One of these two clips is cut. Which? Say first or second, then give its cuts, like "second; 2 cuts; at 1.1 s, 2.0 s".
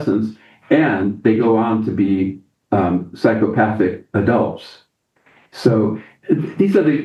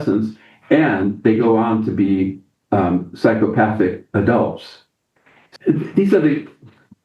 second; 1 cut; at 5.5 s